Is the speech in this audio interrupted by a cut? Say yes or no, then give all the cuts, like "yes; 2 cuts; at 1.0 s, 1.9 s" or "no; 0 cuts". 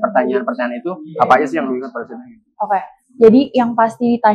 no; 0 cuts